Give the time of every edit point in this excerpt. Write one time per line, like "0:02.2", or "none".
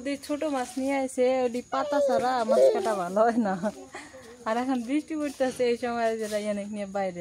none

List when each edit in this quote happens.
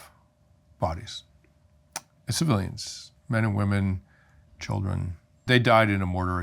0:05.5

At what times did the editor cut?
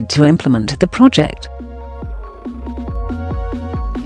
0:01.4

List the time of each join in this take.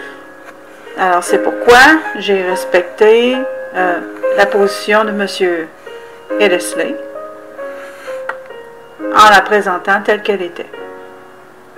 0:08.0

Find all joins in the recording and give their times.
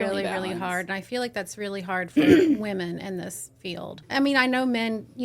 0:04.0

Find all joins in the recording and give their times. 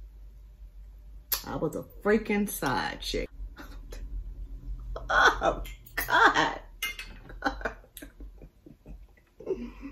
0:03.3

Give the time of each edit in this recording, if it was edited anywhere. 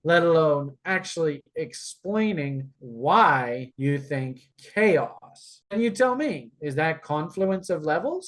0:05.6

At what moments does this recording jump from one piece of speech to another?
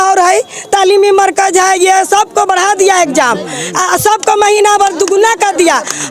none

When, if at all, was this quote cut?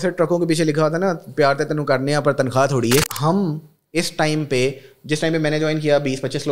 0:03.0

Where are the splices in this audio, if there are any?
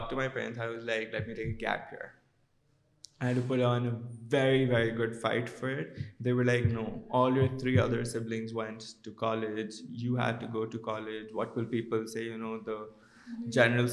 none

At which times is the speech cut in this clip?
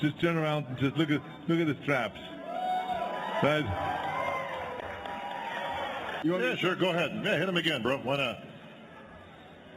0:06.2

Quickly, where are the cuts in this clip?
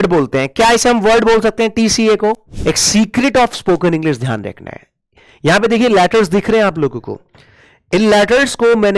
0:02.5

